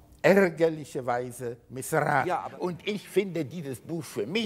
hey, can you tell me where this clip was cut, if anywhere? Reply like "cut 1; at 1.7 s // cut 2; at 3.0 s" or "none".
cut 1; at 2.5 s